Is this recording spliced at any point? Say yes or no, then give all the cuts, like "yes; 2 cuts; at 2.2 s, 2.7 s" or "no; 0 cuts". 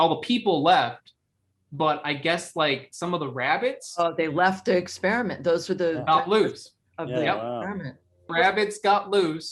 yes; 1 cut; at 8.3 s